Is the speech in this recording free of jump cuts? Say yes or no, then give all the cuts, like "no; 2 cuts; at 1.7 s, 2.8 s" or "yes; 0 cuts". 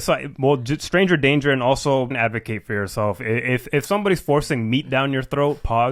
no; 1 cut; at 2.1 s